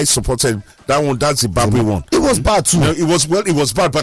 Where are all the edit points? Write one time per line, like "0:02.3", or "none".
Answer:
none